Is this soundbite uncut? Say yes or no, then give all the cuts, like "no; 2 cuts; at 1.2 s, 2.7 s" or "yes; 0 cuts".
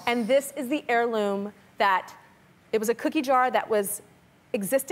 no; 1 cut; at 2.3 s